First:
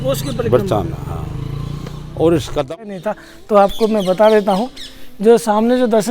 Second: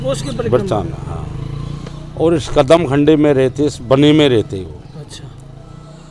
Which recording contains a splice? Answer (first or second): first